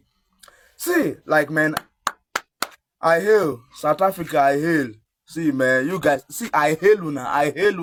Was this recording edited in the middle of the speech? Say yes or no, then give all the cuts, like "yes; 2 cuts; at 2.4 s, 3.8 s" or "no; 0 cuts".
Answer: no; 0 cuts